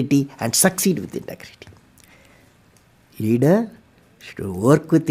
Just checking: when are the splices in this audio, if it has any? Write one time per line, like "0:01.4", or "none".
none